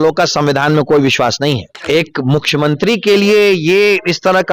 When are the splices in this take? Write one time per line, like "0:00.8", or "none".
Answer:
0:01.7